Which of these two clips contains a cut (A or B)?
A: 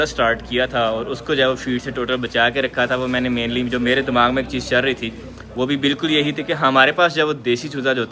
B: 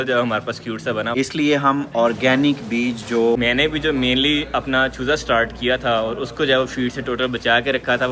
B